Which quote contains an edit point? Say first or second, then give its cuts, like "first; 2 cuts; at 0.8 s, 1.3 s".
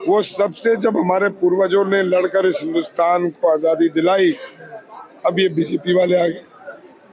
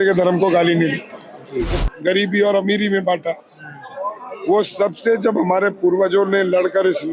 second; 1 cut; at 1.7 s